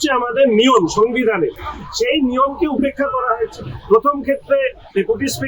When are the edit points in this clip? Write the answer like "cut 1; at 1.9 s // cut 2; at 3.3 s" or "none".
none